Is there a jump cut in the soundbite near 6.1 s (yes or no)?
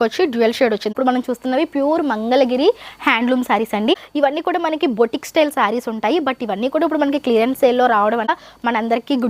no